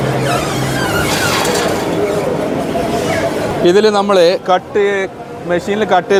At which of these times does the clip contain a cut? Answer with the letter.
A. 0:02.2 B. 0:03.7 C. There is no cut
C